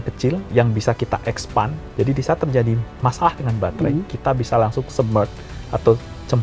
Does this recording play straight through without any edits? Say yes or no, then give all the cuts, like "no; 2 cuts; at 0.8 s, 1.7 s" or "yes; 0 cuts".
no; 1 cut; at 1.8 s